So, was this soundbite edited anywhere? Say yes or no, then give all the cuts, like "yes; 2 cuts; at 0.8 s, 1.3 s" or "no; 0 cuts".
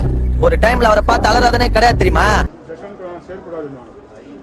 no; 0 cuts